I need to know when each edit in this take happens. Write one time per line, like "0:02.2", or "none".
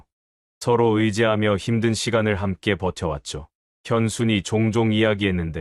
none